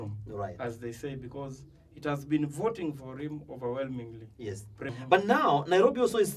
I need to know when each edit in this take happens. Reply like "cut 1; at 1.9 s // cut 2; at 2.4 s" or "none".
cut 1; at 4.9 s